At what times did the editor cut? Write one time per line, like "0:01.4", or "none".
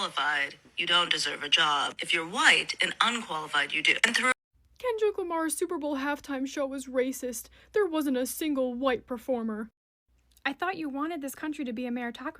0:04.4